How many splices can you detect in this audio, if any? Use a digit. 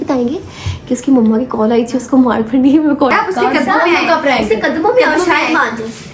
1